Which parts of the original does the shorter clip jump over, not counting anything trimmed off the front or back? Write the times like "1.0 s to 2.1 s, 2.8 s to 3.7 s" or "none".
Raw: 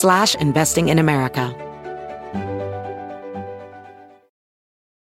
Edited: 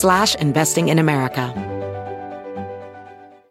1.5 s to 2.3 s